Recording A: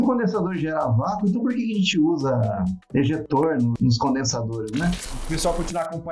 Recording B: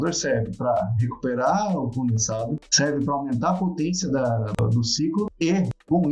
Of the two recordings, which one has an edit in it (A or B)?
A